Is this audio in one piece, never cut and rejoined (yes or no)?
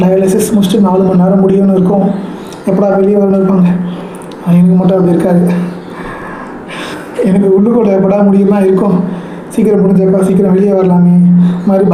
yes